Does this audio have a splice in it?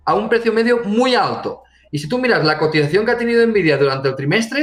no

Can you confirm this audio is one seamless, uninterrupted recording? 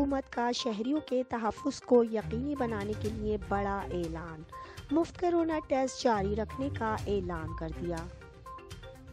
no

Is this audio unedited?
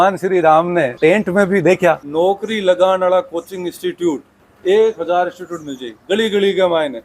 no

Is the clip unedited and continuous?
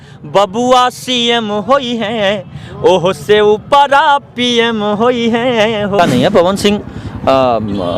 no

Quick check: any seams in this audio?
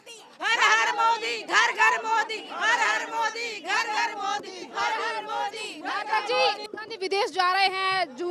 yes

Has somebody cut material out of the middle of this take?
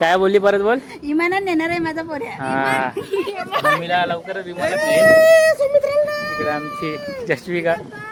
no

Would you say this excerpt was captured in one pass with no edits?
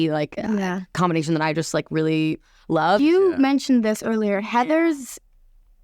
no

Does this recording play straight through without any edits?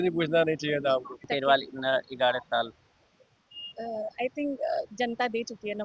no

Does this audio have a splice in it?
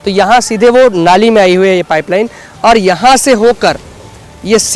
no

